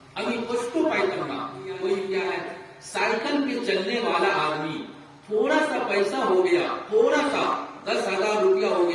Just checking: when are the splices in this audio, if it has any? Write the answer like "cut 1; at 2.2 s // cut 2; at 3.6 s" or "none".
cut 1; at 2.5 s